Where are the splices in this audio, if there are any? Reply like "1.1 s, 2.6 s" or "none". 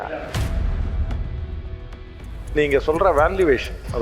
2.4 s

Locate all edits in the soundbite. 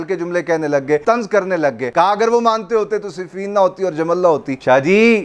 1.0 s, 1.8 s

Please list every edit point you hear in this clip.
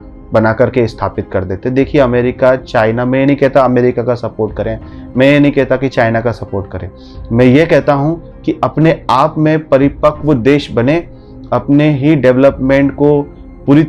none

